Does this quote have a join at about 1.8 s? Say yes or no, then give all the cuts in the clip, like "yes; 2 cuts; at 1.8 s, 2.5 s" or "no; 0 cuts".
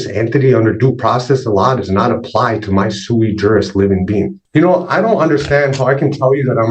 no; 1 cut; at 4.4 s